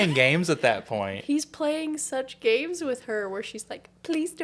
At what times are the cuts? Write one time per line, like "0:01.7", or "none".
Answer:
none